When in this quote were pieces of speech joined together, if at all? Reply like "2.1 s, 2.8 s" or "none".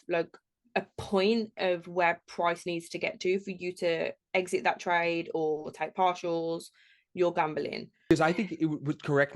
8.1 s